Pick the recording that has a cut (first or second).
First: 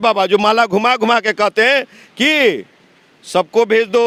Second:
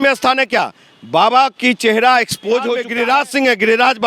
second